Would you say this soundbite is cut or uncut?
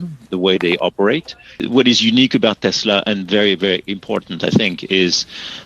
cut